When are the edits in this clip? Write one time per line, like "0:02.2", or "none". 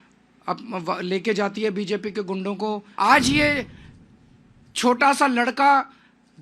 0:02.9